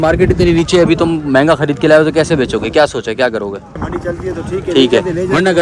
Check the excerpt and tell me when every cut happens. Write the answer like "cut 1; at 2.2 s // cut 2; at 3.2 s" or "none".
cut 1; at 3.8 s